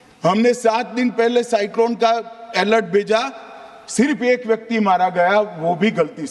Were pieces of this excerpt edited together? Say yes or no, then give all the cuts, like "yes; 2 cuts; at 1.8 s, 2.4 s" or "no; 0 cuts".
no; 0 cuts